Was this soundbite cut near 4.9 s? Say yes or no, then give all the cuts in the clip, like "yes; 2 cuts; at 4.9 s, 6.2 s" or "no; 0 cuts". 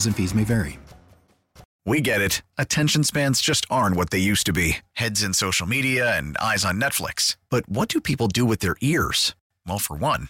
no; 1 cut; at 1.7 s